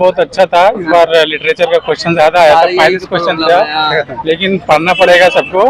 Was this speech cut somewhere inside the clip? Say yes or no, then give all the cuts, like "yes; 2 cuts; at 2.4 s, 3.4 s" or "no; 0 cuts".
no; 0 cuts